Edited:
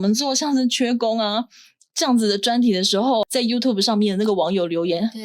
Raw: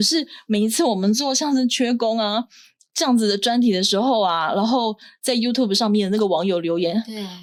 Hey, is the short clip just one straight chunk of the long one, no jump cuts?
no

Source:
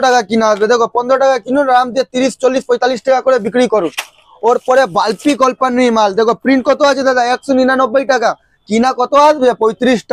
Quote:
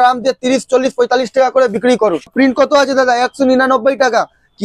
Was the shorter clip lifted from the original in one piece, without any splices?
no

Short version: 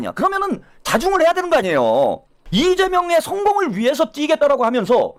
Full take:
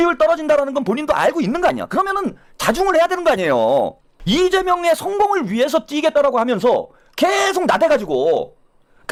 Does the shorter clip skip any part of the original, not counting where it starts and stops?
no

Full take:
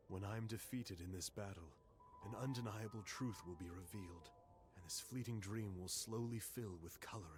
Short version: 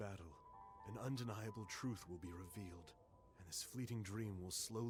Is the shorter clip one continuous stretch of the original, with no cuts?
yes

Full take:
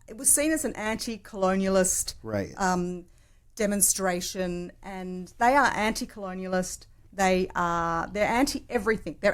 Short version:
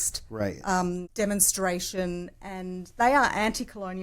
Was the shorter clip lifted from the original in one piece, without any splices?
no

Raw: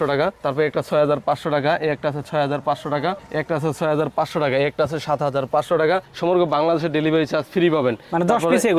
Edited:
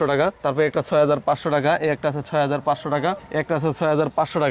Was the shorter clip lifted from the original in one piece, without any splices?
yes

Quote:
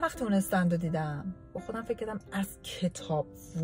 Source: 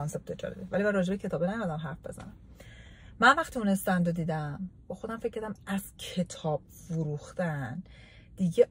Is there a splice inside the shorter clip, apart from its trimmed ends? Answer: no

